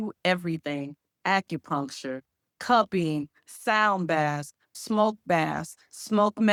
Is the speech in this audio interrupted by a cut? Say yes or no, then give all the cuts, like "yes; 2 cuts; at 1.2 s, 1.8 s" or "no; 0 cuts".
no; 0 cuts